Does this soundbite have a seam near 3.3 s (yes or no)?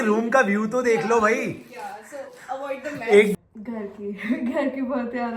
yes